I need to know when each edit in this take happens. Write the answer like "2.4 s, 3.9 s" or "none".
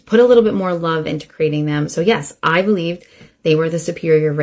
none